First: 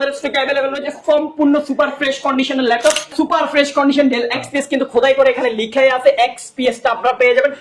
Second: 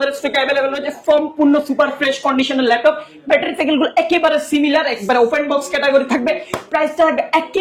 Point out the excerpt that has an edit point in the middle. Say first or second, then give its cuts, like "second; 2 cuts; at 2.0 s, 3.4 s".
first; 1 cut; at 3.1 s